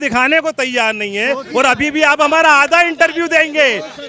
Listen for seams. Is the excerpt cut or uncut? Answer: uncut